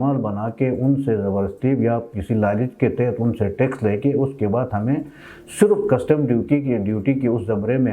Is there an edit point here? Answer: no; 0 cuts

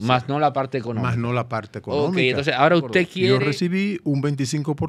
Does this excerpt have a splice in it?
yes; 1 cut; at 3.3 s

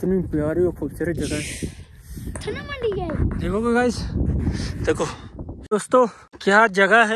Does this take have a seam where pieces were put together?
yes; 2 cuts; at 5.5 s, 6.3 s

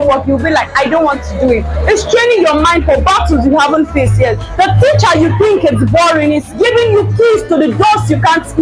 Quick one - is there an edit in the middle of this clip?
no; 0 cuts

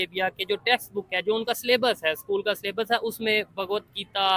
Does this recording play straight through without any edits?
yes; 0 cuts

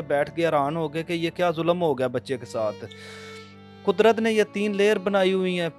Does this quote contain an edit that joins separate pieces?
no; 0 cuts

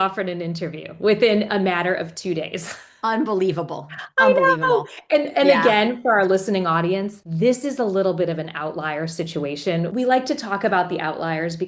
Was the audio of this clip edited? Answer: yes; 2 cuts; at 7.2 s, 9.9 s

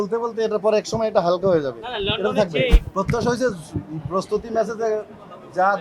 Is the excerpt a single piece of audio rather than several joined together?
no; 1 cut; at 2.8 s

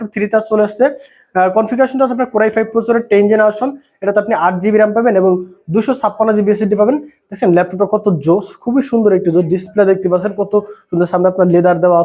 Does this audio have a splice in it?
no; 0 cuts

